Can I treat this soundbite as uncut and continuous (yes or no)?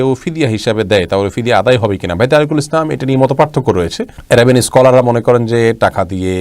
yes